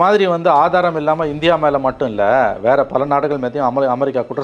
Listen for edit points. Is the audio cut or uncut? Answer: uncut